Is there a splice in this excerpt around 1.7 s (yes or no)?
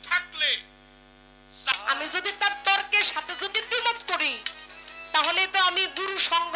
yes